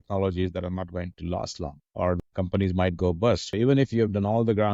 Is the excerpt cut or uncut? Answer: cut